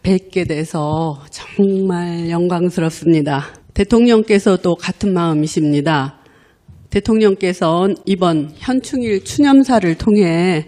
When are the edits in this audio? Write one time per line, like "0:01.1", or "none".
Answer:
0:08.7